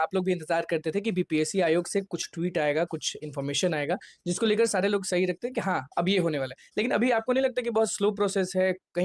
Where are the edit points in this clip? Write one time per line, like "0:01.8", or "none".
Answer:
none